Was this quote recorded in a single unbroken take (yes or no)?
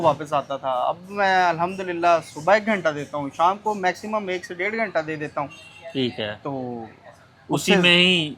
yes